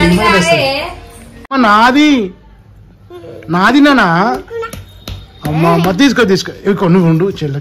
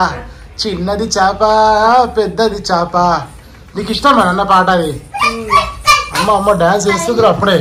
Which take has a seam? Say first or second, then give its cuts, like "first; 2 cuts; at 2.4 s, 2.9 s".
first; 1 cut; at 1.6 s